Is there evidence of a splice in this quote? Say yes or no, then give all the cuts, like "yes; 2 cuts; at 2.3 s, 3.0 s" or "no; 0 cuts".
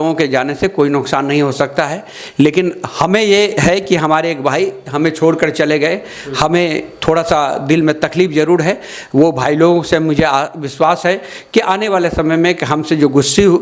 no; 0 cuts